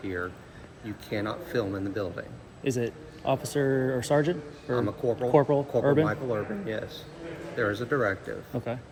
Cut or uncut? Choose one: uncut